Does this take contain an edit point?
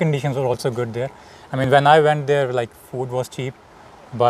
no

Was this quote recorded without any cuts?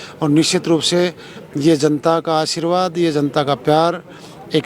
yes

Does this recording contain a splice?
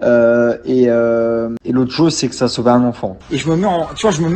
yes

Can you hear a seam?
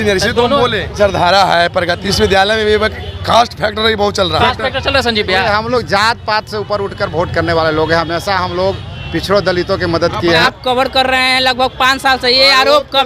yes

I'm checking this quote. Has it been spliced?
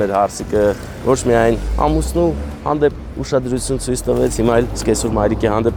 no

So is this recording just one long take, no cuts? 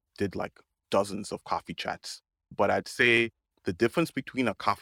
no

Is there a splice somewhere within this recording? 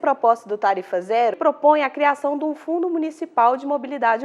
yes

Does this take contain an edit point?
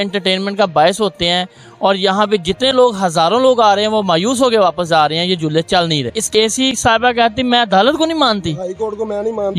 yes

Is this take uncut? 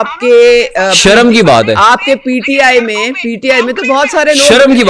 yes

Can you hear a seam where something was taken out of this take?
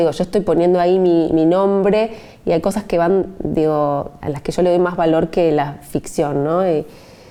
no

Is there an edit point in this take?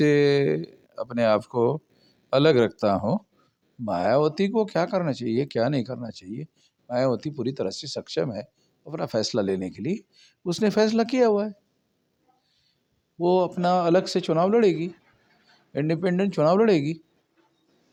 no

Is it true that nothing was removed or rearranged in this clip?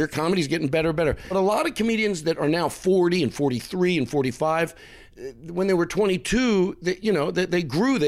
no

